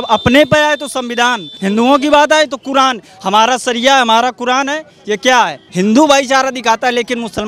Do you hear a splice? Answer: yes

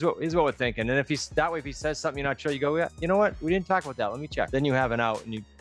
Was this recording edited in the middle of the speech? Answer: yes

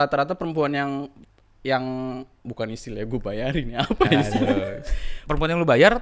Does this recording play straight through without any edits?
yes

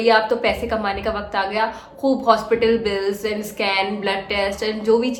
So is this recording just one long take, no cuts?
yes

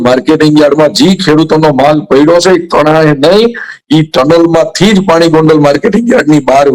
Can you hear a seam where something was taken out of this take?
no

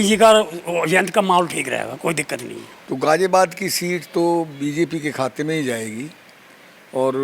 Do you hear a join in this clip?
yes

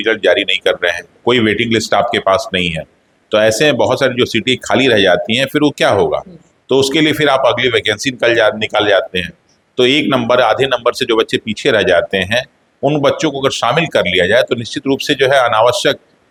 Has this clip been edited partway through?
no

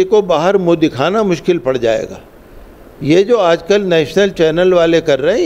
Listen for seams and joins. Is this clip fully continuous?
yes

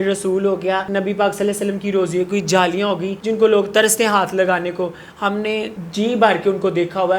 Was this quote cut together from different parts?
yes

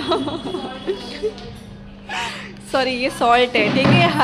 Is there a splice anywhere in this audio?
no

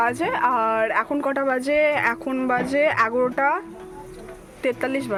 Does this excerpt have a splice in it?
no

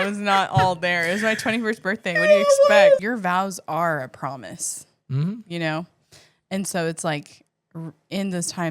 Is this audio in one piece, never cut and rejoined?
no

